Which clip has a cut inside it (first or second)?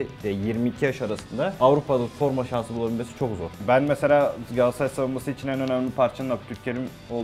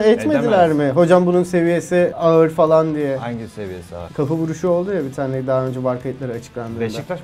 first